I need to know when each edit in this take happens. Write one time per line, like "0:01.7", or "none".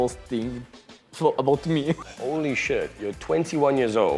0:02.0

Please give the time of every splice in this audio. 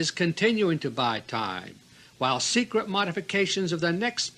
0:02.7

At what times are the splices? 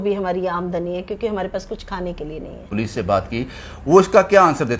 0:02.7

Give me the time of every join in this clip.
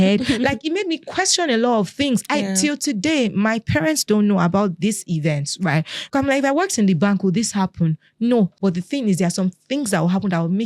0:06.0
0:08.5

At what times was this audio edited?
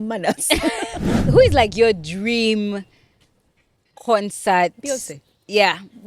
0:01.1

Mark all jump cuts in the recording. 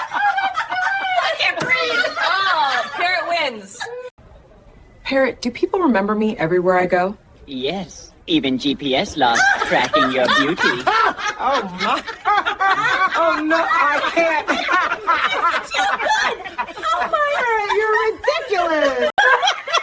0:04.3
0:19.1

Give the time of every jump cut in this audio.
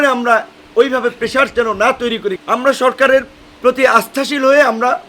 0:02.4
0:03.4

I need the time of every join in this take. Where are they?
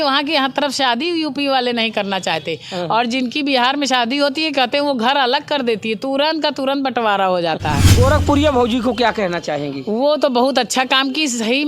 0:07.9

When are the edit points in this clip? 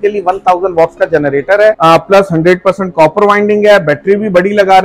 0:01.8

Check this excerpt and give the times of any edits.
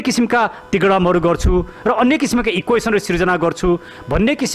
none

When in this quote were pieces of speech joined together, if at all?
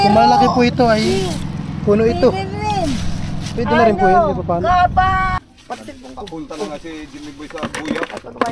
0:05.4

